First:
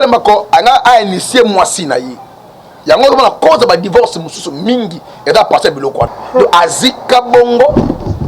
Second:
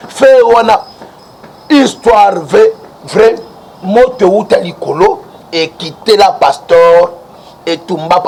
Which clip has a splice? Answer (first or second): first